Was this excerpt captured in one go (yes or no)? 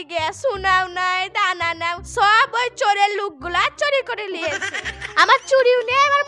yes